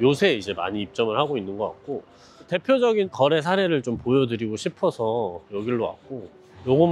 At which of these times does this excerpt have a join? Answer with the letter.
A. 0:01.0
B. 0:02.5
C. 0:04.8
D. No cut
D